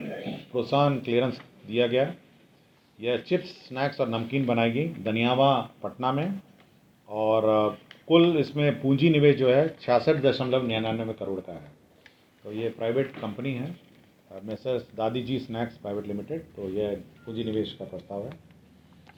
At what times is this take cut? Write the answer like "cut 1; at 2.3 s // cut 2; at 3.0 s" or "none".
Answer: none